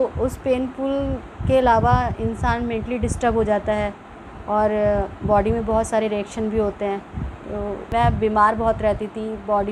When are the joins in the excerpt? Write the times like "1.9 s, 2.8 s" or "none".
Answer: 7.9 s